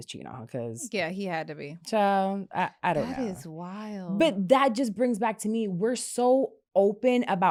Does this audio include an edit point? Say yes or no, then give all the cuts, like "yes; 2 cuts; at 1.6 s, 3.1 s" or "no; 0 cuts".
no; 0 cuts